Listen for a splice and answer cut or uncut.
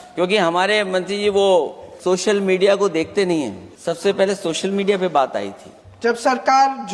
cut